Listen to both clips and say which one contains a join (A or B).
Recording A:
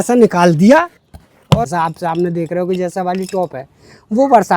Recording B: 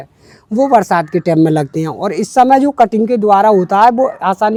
A